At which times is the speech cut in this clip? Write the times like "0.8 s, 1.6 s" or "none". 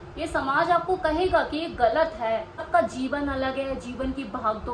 2.6 s